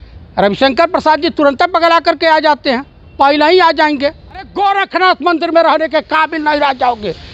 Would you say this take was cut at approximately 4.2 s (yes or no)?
yes